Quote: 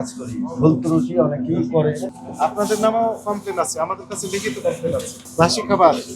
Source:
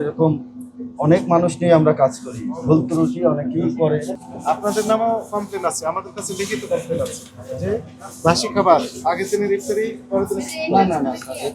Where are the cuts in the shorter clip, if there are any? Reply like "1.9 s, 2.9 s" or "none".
5.2 s